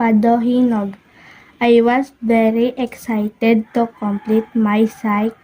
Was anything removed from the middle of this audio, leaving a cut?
yes; 1 cut; at 3.7 s

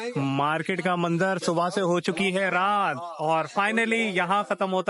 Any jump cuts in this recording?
no; 0 cuts

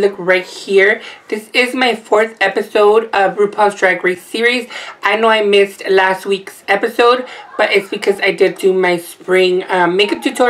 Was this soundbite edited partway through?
yes; 1 cut; at 8.2 s

